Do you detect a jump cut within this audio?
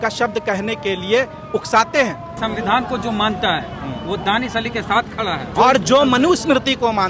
yes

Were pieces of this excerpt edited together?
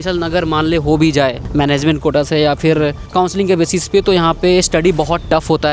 no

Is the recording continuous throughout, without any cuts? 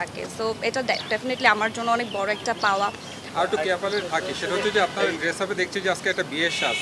no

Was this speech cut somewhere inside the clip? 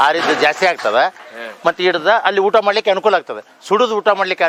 no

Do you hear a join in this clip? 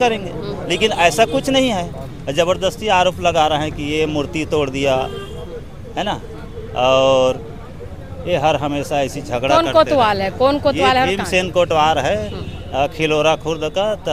no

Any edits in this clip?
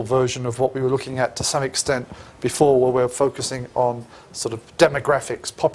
no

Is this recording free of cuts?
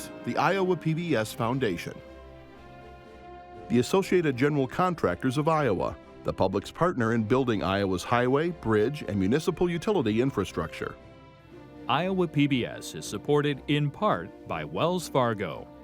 no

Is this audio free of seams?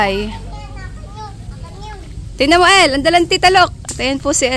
yes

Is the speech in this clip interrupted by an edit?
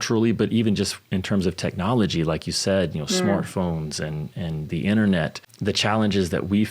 yes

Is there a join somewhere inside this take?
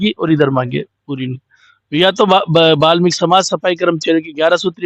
no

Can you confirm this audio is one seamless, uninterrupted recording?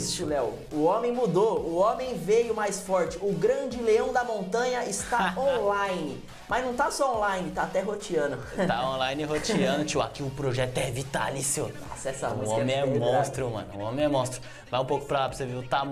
yes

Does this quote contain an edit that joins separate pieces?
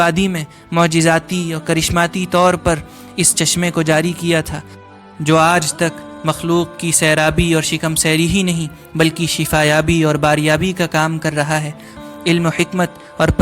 yes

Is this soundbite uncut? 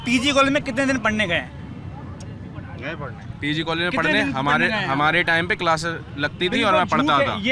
yes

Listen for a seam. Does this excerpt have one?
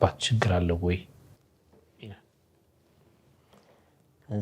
no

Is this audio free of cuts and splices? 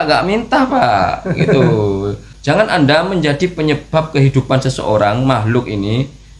yes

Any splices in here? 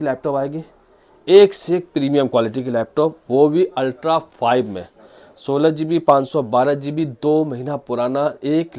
no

